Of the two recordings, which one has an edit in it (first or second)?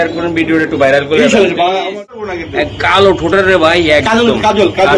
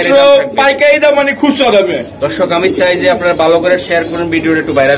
first